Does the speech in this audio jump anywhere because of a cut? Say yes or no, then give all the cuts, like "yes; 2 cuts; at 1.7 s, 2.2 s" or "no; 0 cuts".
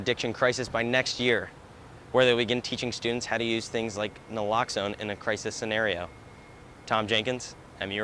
no; 0 cuts